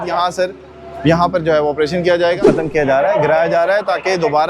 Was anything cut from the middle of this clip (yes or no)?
yes